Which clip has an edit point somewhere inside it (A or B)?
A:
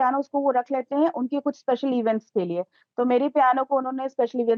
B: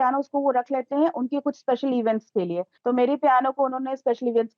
B